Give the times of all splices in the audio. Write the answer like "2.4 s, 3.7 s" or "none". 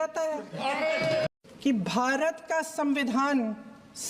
1.3 s

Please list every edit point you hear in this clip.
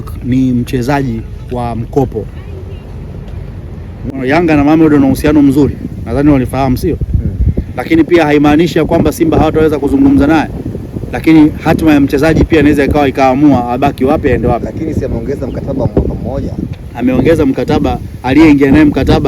4.1 s

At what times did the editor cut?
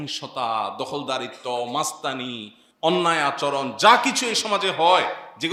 none

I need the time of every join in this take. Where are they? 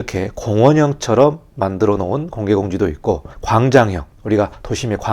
3.3 s, 4.3 s

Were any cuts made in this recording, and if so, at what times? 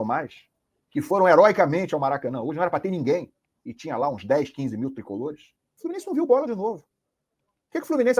5.7 s

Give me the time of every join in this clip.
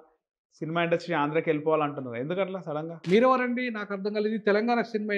2.9 s

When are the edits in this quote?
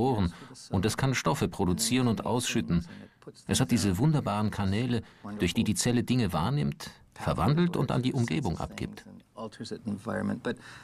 3.4 s

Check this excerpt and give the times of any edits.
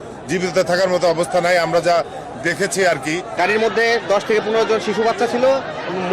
3.4 s

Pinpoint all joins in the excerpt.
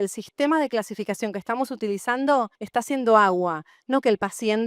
2.6 s

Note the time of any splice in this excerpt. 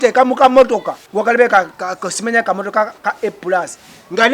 1.0 s

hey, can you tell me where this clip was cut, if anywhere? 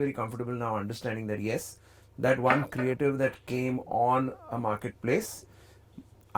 none

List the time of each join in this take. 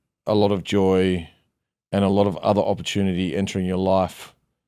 none

